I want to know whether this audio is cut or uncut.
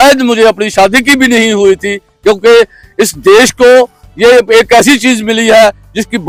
uncut